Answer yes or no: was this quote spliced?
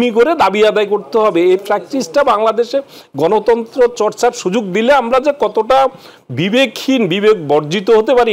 no